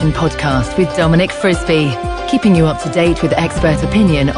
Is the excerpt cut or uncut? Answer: uncut